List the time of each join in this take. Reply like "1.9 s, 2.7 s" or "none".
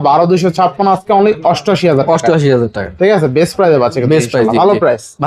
none